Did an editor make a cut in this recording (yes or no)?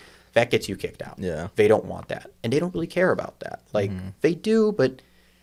no